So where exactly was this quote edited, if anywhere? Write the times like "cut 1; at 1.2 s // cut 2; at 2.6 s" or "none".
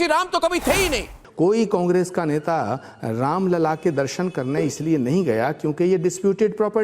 cut 1; at 1.2 s